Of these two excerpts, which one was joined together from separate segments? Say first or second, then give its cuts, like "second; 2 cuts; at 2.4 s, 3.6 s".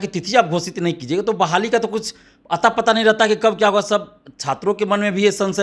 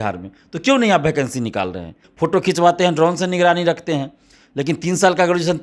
second; 1 cut; at 2.0 s